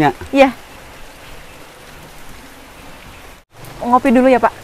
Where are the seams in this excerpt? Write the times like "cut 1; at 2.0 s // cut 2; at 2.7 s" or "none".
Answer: cut 1; at 3.5 s